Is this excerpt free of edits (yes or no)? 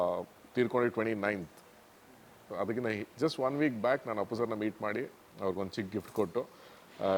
yes